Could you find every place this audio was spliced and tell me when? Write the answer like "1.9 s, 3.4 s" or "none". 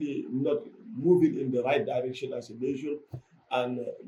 none